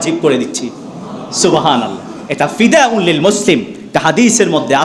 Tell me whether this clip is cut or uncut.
uncut